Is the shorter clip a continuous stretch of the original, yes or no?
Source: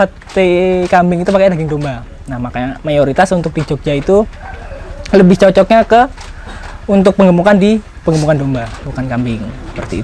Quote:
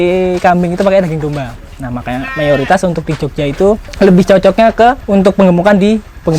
no